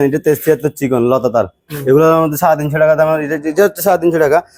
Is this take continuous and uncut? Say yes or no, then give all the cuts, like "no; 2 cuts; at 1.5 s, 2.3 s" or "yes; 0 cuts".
yes; 0 cuts